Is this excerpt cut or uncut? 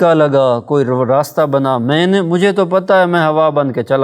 uncut